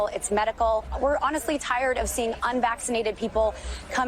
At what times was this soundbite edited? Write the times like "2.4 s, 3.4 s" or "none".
0.9 s